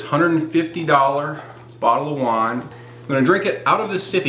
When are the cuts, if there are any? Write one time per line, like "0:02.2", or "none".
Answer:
0:02.7